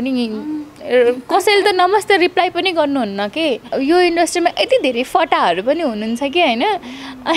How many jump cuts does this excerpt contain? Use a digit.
1